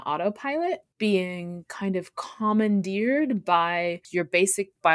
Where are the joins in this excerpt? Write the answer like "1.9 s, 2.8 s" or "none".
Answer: 0.9 s, 4.0 s